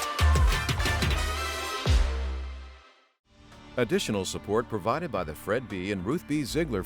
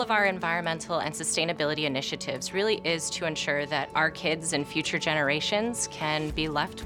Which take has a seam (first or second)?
first